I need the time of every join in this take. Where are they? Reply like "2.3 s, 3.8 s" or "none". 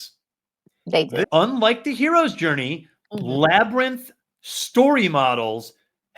1.2 s